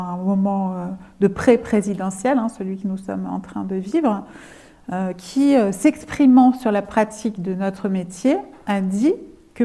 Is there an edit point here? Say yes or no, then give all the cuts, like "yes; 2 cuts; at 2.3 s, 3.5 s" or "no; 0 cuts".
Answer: no; 0 cuts